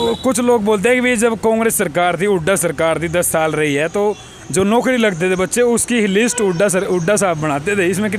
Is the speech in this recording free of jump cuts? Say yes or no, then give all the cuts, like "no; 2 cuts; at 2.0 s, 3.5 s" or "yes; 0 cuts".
yes; 0 cuts